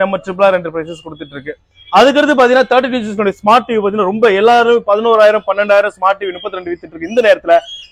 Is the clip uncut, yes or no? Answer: yes